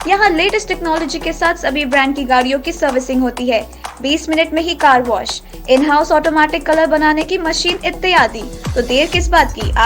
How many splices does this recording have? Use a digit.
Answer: 0